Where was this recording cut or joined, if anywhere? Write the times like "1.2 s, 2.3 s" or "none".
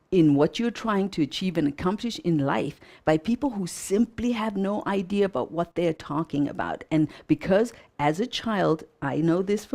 none